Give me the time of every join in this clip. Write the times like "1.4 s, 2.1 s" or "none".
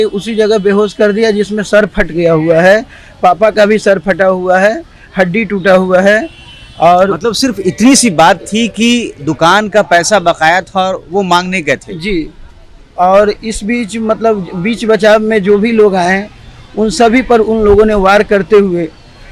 none